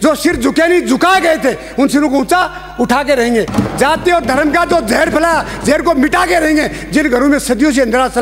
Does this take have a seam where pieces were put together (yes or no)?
no